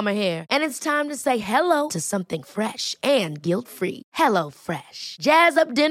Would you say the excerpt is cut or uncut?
uncut